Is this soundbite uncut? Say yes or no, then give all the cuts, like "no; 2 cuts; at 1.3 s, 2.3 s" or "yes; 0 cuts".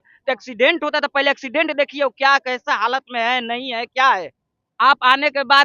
yes; 0 cuts